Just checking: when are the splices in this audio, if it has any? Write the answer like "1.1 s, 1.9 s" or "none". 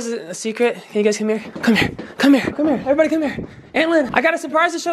1.5 s, 2.6 s, 4.1 s

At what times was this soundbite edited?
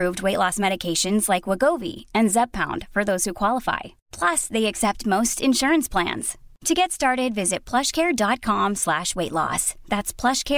none

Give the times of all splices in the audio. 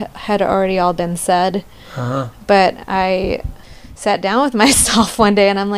none

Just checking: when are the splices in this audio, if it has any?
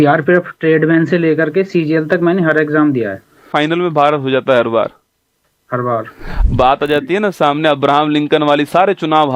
3.5 s, 6.3 s

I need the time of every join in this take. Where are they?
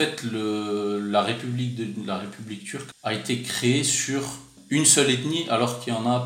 2.8 s, 4.5 s

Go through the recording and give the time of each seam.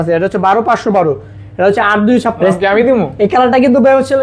2.4 s

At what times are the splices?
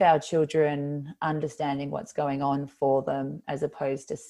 none

